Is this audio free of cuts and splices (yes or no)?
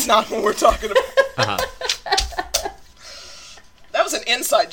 yes